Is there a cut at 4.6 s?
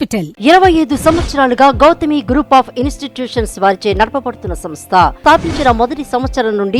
no; 0 cuts

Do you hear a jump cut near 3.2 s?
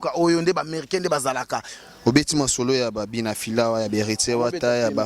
no; 1 cut; at 1.7 s

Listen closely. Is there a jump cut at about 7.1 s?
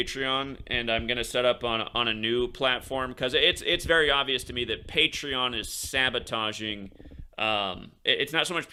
no; 0 cuts

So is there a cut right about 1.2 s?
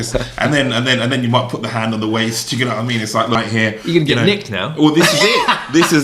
no; 1 cut; at 3.4 s

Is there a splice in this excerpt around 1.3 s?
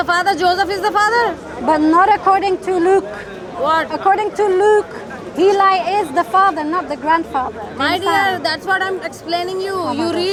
no; 0 cuts

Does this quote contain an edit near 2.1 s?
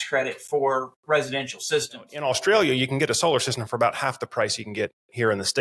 yes; 1 cut; at 2.1 s

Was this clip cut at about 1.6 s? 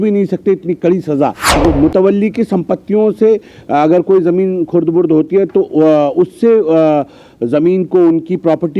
yes; 1 cut; at 1.6 s

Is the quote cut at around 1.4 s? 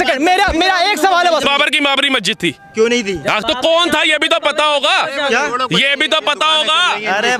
yes; 1 cut; at 1.4 s

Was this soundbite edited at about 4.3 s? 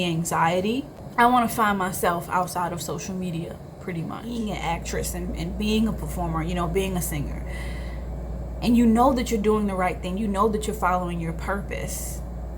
yes; 2 cuts; at 1.0 s, 4.3 s

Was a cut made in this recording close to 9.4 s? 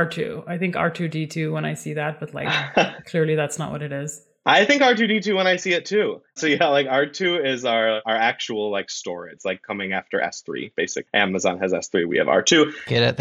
yes; 3 cuts; at 8.0 s, 9.4 s, 11.0 s

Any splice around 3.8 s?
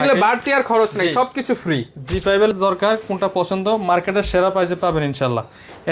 no; 1 cut; at 2.5 s

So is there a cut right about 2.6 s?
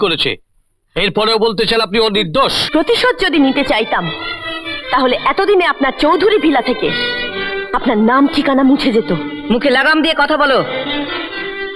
yes; 1 cut; at 2.6 s

